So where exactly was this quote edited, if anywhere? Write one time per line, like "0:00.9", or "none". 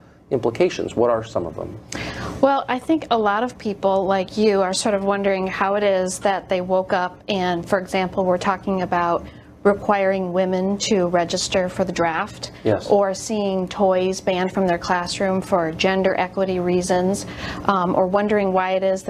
0:06.1